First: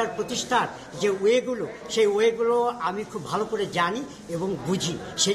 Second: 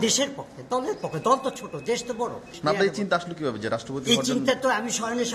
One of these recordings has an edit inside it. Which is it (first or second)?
second